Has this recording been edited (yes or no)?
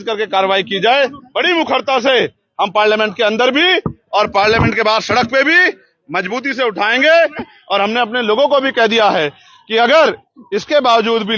yes